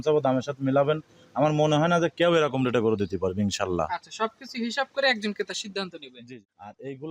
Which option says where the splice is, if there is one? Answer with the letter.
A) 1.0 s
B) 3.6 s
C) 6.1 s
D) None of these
C